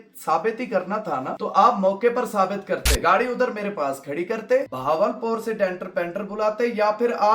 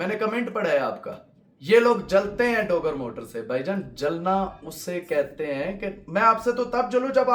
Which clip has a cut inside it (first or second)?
first